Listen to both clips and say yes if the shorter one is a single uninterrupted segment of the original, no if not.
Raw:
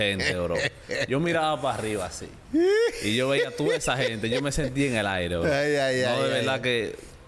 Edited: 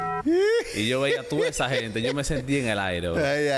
yes